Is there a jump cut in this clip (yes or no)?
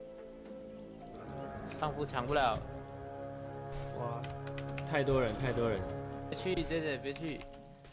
no